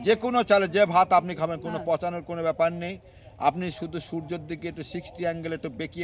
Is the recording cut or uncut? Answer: uncut